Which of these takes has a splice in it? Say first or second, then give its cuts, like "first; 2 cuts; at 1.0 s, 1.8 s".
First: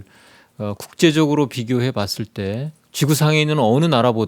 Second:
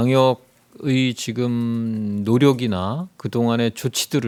first; 1 cut; at 2.8 s